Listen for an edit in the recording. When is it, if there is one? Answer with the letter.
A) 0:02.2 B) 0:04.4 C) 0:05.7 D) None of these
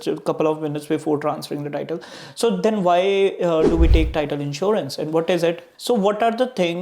C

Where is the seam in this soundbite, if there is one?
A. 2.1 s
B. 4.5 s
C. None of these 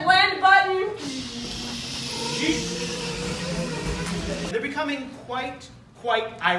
B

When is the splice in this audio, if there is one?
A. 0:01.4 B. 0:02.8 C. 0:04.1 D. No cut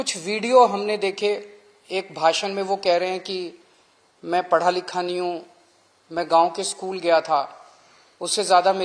D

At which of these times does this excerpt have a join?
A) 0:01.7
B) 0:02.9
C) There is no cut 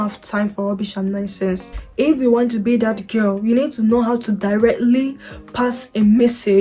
A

